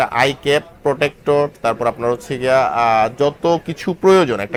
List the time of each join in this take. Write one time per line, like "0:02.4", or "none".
none